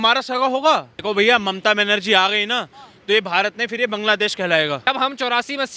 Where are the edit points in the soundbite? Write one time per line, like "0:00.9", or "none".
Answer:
0:00.9
0:04.9